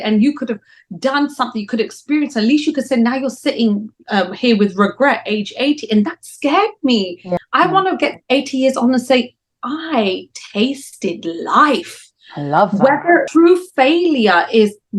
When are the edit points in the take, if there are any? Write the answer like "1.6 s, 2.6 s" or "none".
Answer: 7.3 s, 13.3 s